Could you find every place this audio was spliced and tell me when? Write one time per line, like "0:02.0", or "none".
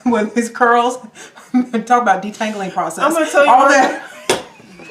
none